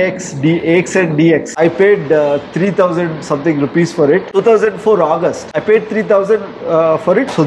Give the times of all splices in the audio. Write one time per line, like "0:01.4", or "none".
0:01.6